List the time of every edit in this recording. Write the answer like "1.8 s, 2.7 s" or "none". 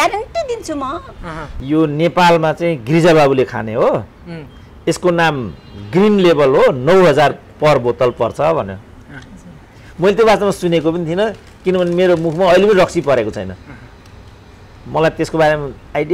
1.5 s